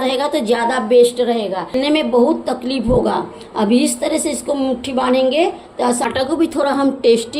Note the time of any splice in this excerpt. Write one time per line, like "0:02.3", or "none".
0:01.8
0:06.1